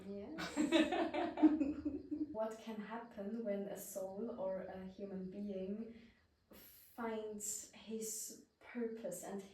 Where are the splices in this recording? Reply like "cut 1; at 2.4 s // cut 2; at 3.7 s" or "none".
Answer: cut 1; at 2.3 s